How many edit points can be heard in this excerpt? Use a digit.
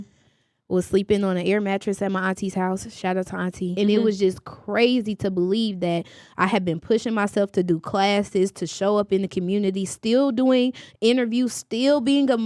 1